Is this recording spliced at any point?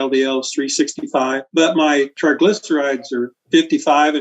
yes; 1 cut; at 1.4 s

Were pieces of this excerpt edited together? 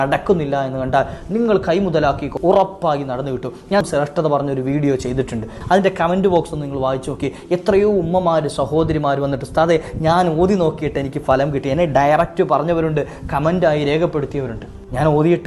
yes; 3 cuts; at 2.3 s, 3.9 s, 5.6 s

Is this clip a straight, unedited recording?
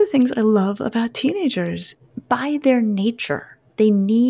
no; 1 cut; at 1.9 s

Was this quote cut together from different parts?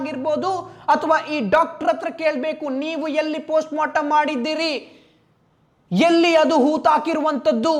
no; 0 cuts

